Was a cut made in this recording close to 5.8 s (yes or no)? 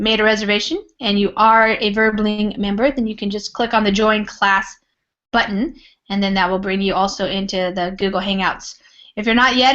yes